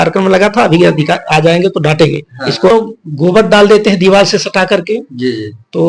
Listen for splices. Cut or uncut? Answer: cut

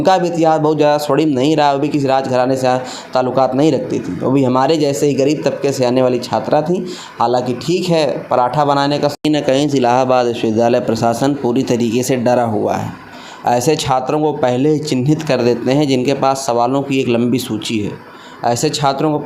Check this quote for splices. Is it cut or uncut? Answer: cut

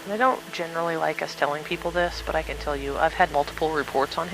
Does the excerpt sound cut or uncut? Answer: cut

